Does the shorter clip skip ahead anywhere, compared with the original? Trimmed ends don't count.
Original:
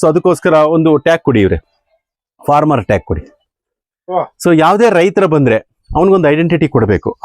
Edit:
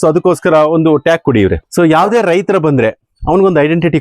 yes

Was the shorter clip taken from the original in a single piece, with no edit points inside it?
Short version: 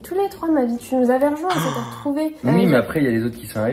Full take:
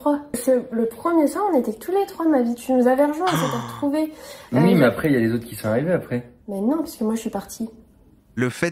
no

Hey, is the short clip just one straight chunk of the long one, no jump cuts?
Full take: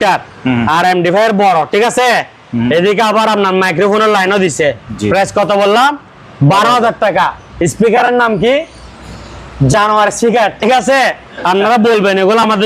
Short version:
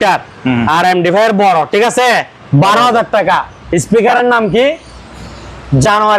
no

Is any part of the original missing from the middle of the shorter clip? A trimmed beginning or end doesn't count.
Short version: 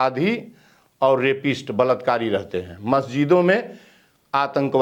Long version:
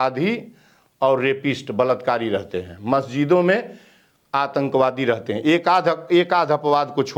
no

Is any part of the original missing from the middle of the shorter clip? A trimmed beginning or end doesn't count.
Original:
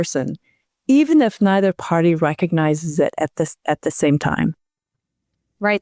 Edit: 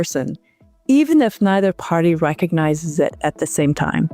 yes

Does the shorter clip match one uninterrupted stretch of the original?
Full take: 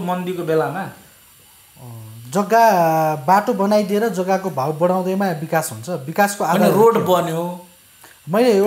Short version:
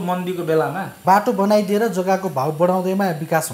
no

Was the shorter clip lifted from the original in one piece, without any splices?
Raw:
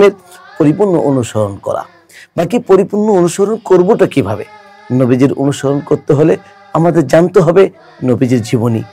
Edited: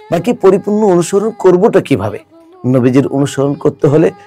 yes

